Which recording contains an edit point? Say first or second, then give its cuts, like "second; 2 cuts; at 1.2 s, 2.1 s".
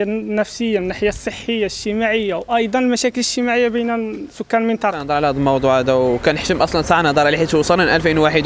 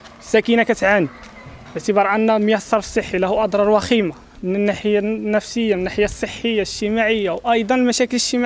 first; 1 cut; at 5.1 s